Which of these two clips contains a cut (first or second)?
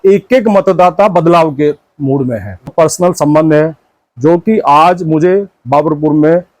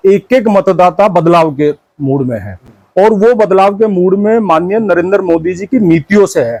first